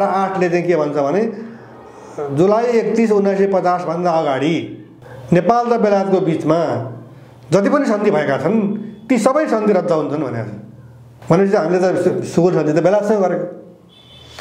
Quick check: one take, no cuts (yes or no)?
yes